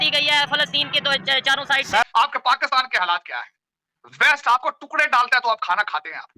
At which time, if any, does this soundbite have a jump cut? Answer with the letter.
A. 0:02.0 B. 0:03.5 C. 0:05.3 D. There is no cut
A